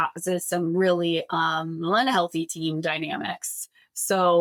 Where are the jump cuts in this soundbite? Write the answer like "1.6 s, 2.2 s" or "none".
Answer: none